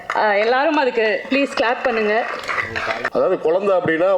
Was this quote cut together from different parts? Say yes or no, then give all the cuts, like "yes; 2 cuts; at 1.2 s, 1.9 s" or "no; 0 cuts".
yes; 1 cut; at 3.0 s